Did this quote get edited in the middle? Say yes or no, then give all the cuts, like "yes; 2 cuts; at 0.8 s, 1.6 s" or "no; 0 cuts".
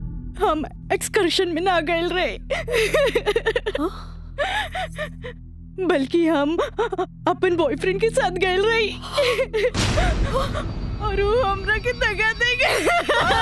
no; 0 cuts